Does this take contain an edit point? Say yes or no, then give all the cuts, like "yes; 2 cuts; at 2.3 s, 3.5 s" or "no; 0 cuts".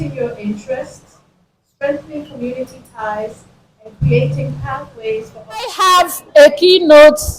yes; 1 cut; at 5.7 s